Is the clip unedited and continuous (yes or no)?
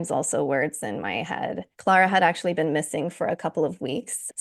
no